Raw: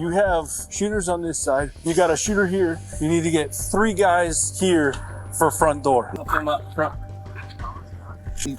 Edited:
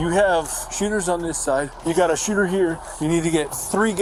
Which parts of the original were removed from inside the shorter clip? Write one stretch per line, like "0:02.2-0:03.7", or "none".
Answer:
none